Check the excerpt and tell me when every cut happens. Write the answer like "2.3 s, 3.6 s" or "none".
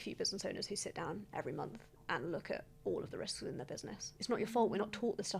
4.2 s